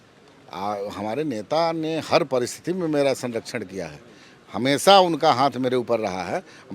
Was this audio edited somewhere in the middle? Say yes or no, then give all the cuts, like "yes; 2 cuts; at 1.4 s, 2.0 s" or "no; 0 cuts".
no; 0 cuts